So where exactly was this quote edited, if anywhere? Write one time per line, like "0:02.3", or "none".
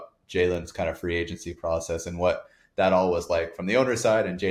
none